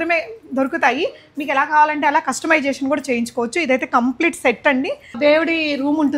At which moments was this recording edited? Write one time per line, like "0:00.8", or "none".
0:05.2